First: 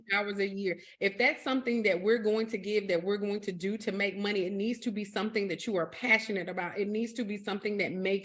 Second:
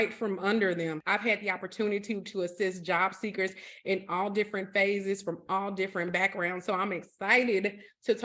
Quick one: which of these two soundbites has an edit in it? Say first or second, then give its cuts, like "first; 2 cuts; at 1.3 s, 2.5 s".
second; 1 cut; at 1.0 s